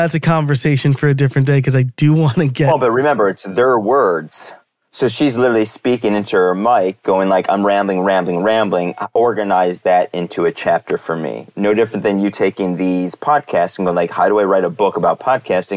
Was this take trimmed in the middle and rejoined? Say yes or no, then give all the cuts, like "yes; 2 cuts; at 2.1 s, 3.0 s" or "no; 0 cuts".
no; 0 cuts